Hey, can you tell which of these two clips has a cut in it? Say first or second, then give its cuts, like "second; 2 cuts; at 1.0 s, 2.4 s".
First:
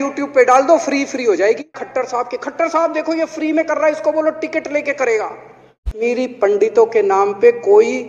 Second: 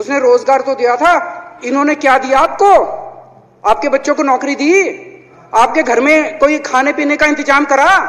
first; 2 cuts; at 1.8 s, 5.9 s